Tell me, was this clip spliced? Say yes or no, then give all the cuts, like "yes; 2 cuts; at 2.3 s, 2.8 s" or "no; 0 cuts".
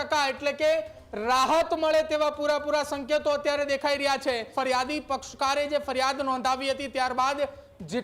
yes; 1 cut; at 4.5 s